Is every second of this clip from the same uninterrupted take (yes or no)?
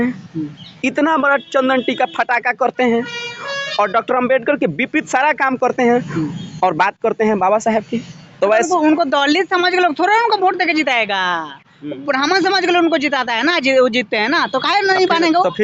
yes